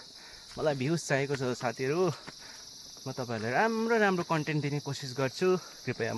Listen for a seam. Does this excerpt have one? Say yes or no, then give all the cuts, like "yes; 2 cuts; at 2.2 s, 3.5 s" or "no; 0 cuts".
no; 0 cuts